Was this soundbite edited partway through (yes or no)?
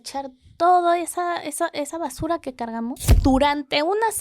yes